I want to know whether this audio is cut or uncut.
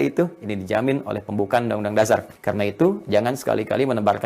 cut